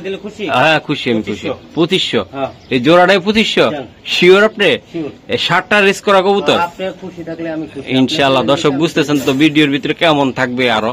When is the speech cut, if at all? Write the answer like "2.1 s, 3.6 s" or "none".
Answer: none